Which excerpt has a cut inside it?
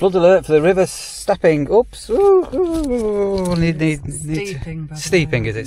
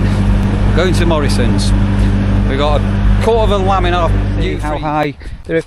second; 1 cut; at 4.5 s

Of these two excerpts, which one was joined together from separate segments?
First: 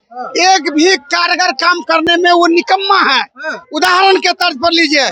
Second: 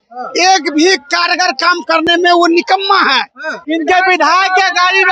second; 1 cut; at 3.6 s

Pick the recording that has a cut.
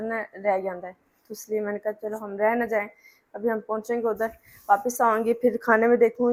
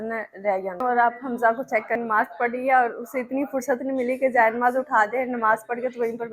second; 2 cuts; at 0.8 s, 2.0 s

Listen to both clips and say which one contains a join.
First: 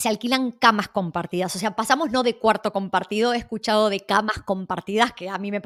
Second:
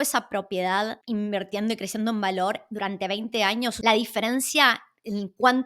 second; 2 cuts; at 1.0 s, 3.8 s

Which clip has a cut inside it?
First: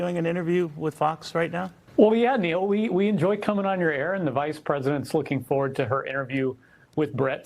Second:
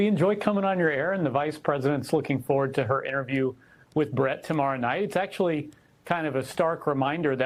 first; 1 cut; at 1.8 s

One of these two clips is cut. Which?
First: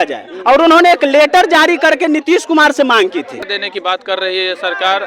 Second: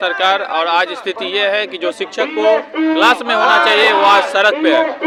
first; 1 cut; at 3.5 s

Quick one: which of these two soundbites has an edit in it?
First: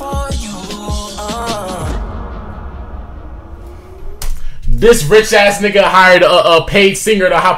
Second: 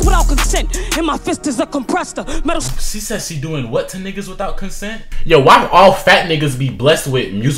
second; 1 cut; at 5.1 s

